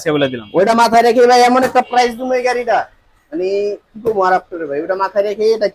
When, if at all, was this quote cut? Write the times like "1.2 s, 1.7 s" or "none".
none